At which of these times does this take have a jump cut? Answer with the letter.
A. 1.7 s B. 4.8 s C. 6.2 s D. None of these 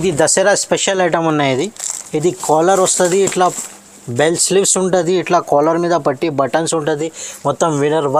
D